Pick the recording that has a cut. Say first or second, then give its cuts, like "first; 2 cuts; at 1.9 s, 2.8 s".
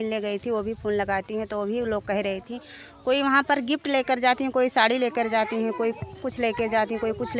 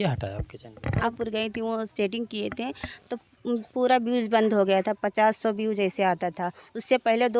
second; 1 cut; at 1.1 s